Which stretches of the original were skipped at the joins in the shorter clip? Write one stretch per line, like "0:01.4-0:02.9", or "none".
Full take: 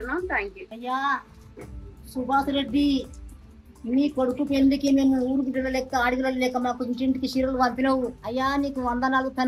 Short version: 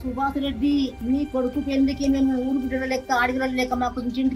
0:03.1-0:03.8